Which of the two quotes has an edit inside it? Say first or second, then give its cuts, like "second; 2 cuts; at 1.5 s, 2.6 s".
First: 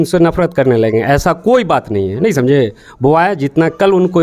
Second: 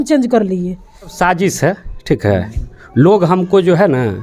second; 1 cut; at 1.1 s